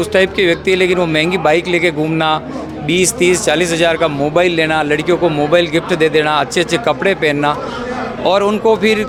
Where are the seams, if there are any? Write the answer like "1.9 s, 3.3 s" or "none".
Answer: none